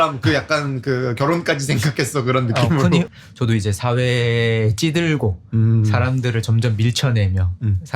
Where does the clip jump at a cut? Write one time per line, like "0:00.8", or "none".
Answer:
0:03.2